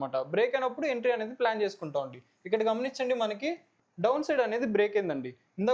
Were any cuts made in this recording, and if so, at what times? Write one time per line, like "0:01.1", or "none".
none